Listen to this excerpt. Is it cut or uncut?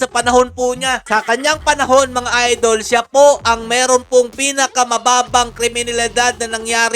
cut